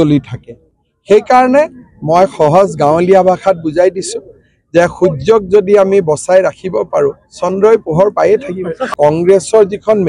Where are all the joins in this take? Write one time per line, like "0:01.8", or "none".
0:08.9